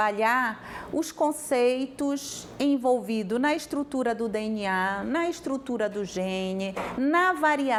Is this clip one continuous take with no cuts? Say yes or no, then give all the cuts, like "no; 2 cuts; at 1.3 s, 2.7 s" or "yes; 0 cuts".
yes; 0 cuts